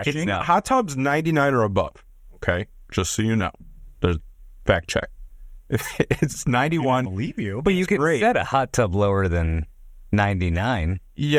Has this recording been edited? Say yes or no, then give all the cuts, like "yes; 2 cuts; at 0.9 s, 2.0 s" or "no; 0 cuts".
no; 0 cuts